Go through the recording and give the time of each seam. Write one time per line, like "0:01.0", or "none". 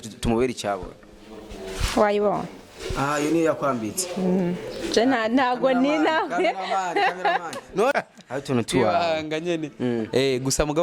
0:07.9